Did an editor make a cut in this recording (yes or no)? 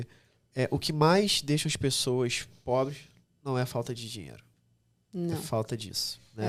no